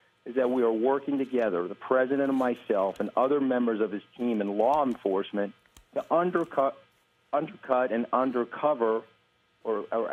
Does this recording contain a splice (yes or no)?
no